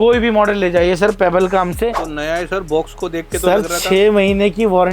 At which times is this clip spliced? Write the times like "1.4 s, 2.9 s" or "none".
2.0 s